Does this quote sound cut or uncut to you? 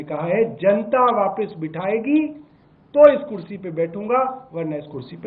uncut